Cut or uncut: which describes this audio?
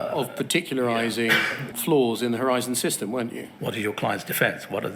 cut